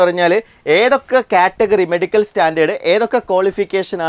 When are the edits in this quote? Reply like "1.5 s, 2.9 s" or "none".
none